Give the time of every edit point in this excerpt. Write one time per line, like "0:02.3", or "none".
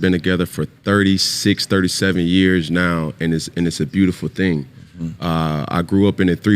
0:04.2